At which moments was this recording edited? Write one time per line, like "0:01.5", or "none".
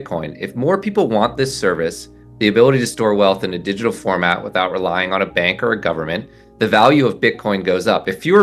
none

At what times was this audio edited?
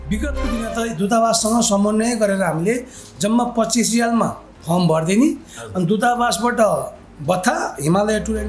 none

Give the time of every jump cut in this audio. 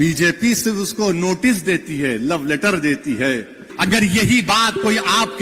0:03.7

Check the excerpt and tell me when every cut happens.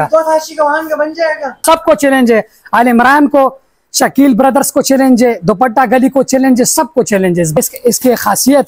0:01.6
0:07.6

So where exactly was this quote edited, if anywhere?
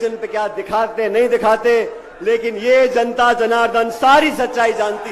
none

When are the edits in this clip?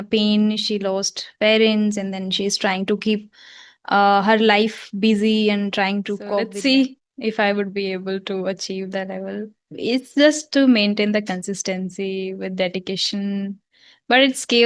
0:06.4

